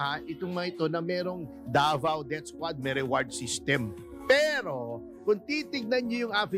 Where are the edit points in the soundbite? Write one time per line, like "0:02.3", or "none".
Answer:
none